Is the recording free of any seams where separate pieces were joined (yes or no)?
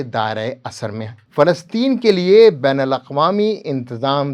no